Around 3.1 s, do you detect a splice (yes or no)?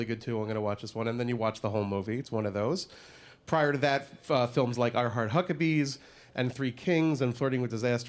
yes